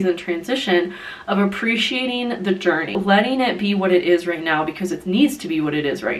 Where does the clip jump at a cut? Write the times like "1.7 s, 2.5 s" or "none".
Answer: 2.9 s